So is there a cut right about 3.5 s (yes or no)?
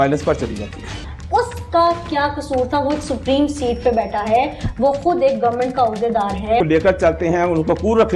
no